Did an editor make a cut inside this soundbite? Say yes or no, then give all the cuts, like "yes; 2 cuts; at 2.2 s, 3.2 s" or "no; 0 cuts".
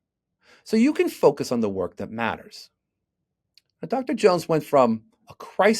no; 0 cuts